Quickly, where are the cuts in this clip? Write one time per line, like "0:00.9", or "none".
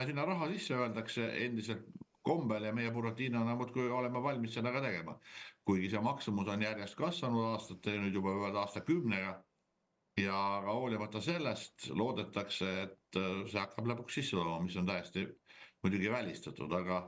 none